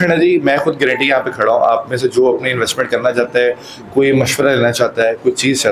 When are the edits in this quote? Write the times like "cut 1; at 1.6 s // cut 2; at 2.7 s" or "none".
none